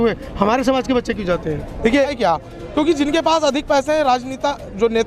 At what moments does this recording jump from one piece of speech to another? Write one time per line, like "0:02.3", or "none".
0:02.1